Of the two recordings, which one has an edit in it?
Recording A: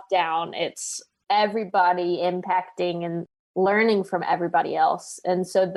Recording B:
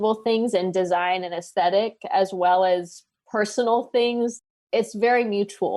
B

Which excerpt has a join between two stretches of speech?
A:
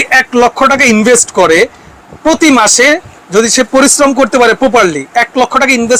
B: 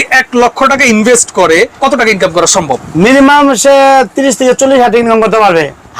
B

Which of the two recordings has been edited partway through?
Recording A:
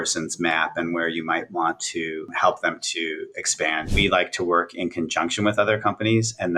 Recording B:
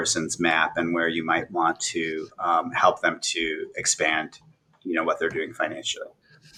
A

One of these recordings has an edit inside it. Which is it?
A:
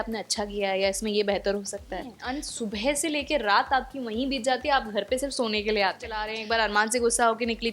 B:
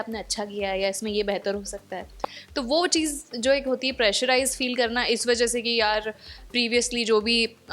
A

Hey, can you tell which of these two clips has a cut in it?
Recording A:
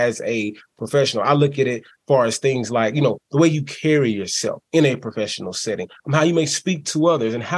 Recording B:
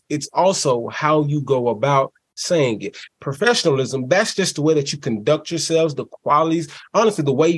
B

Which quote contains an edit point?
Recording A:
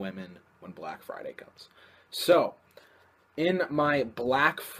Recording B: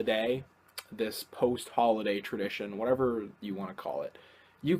B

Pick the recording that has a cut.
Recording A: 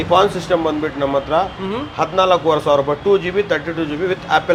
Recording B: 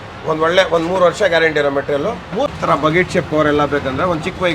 B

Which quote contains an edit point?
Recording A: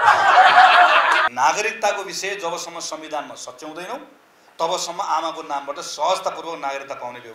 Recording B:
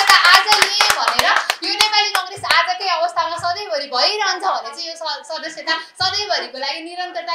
A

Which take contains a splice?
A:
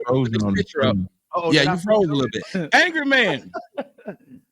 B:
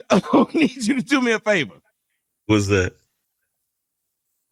A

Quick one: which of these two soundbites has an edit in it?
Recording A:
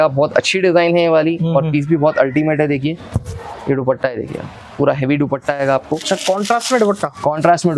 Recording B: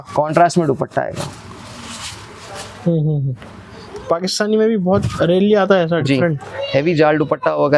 A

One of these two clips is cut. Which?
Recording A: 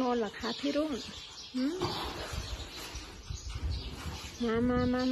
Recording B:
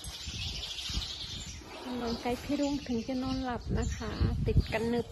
B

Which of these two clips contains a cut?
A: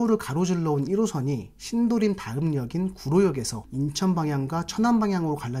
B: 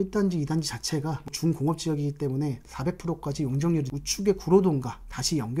B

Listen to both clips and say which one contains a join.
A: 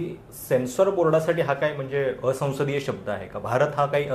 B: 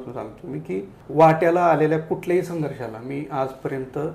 B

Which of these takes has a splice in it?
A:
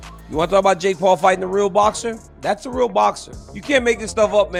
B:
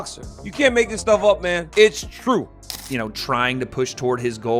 B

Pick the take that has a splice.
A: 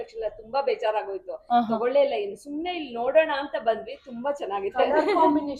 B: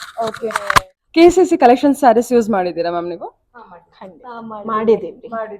B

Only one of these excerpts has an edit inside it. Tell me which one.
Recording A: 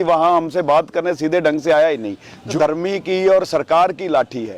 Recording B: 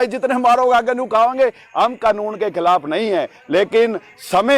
A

